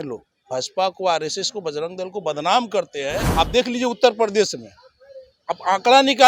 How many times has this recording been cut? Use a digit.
1